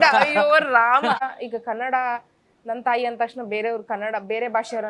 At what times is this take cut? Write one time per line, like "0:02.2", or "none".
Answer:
0:01.2